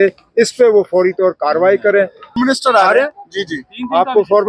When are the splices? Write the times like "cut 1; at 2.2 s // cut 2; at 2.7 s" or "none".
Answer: cut 1; at 2.4 s